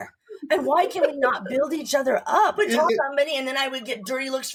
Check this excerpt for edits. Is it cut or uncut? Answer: uncut